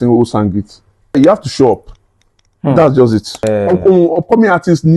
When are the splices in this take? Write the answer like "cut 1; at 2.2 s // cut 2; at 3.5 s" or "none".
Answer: cut 1; at 1.2 s // cut 2; at 3.4 s

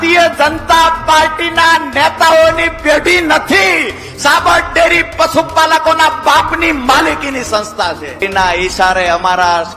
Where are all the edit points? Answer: cut 1; at 8.2 s

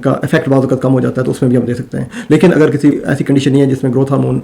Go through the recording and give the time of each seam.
cut 1; at 3.0 s

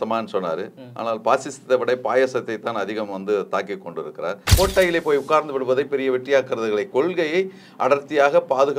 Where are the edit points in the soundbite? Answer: cut 1; at 4.5 s

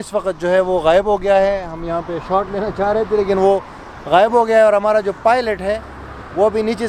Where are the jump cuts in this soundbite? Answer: none

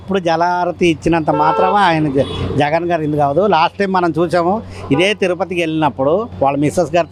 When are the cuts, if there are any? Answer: none

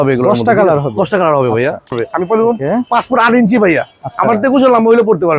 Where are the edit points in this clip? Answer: cut 1; at 2.0 s

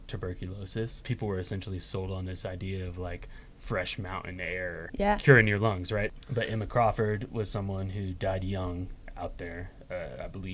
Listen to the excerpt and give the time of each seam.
cut 1; at 1.0 s // cut 2; at 4.9 s // cut 3; at 6.1 s

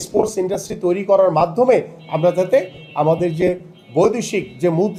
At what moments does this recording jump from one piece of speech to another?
none

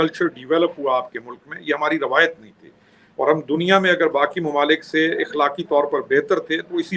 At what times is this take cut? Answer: none

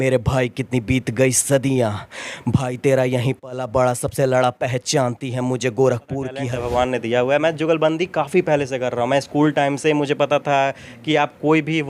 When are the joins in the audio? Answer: cut 1; at 6.4 s

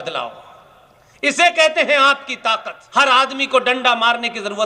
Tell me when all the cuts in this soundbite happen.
cut 1; at 2.7 s

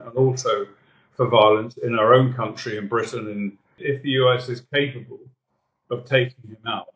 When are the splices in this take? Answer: cut 1; at 3.8 s

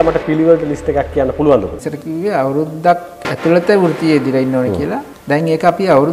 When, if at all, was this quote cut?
cut 1; at 1.7 s

